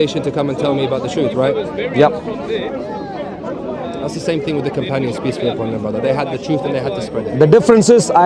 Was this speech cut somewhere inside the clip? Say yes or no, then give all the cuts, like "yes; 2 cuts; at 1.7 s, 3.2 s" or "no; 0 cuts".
no; 0 cuts